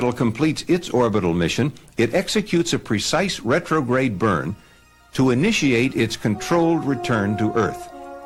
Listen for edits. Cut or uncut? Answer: uncut